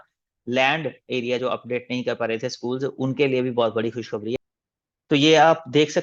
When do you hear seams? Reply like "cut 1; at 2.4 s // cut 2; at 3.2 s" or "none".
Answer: cut 1; at 4.4 s